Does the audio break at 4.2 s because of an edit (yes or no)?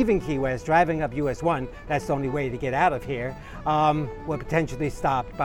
no